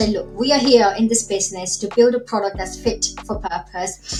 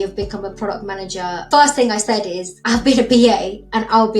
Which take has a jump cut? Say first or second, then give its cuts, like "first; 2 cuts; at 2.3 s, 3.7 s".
second; 2 cuts; at 1.5 s, 2.6 s